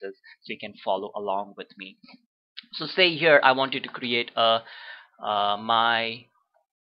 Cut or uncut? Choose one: uncut